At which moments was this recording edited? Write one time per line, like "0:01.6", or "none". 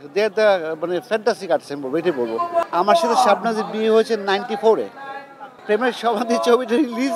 0:02.7
0:05.6